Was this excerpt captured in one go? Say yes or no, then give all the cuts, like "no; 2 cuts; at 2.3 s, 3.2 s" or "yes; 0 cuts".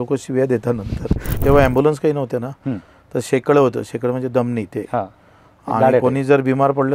no; 1 cut; at 1.3 s